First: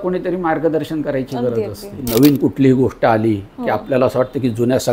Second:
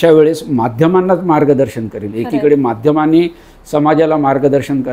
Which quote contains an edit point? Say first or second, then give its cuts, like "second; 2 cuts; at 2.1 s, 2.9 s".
first; 1 cut; at 2.1 s